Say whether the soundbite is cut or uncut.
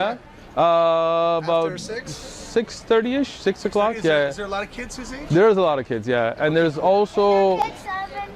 uncut